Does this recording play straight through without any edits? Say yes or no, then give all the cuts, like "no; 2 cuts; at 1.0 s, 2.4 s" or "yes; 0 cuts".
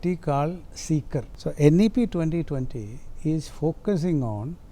no; 1 cut; at 1.3 s